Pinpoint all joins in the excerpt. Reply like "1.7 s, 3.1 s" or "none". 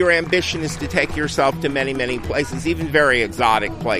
none